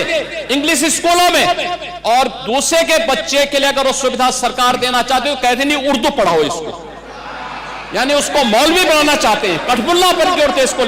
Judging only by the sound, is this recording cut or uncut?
uncut